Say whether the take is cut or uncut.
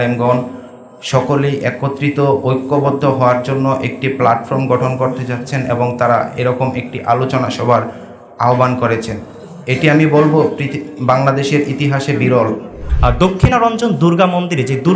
cut